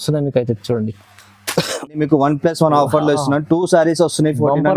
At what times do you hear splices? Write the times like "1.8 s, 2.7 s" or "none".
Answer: 2.0 s